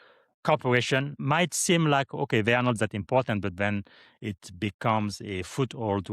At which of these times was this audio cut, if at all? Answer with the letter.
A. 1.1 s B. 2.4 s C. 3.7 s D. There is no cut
A